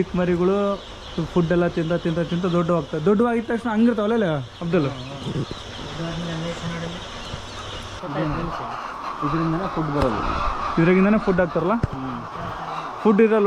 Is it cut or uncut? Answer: cut